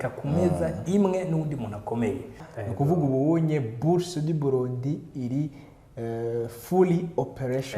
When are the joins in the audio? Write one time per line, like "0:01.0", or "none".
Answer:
0:02.5